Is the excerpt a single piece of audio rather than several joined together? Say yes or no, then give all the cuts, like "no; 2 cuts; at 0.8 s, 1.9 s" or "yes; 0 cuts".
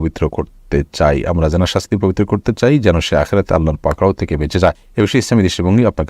no; 1 cut; at 4.8 s